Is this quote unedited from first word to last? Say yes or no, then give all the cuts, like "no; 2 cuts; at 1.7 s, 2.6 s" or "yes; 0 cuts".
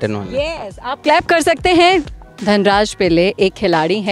no; 1 cut; at 2.1 s